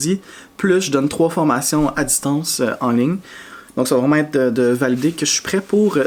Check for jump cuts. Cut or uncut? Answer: uncut